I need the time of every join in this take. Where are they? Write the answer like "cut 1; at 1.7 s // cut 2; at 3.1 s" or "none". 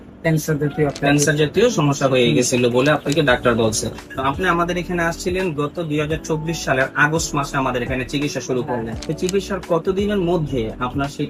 cut 1; at 4.1 s // cut 2; at 9.0 s